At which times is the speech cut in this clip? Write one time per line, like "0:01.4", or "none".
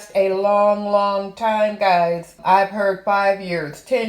0:02.4